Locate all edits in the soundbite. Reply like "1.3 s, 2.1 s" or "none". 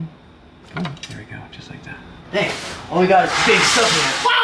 2.1 s